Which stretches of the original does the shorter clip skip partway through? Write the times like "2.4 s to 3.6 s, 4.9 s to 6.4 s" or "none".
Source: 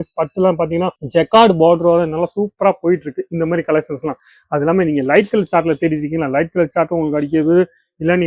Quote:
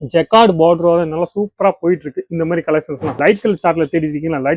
4.2 s to 5.1 s